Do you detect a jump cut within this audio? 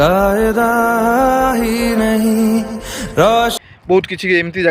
yes; 1 cut; at 3.5 s

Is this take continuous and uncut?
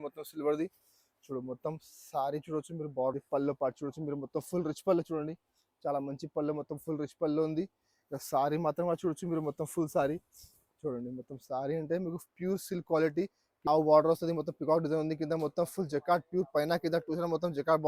no; 2 cuts; at 3.1 s, 13.5 s

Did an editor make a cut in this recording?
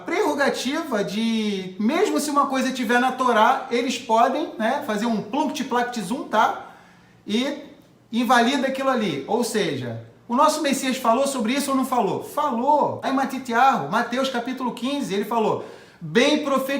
yes; 1 cut; at 13.0 s

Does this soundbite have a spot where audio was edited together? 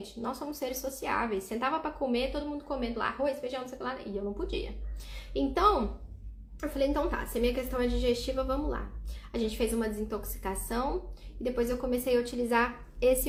no; 0 cuts

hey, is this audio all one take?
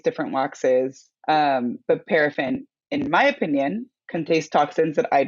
no; 2 cuts; at 1.1 s, 3.9 s

